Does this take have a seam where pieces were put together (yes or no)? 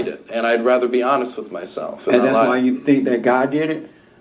no